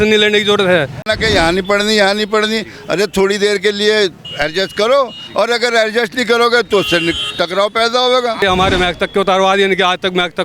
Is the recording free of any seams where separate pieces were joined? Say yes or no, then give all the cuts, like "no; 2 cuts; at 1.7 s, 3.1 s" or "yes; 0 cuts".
no; 2 cuts; at 1.1 s, 8.4 s